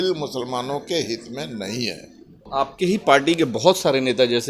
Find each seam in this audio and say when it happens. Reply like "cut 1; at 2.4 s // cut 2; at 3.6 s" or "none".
cut 1; at 2.4 s